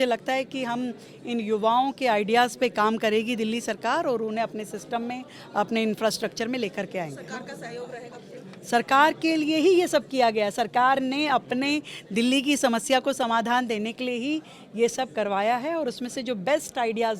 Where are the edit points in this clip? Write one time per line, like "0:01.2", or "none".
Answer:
none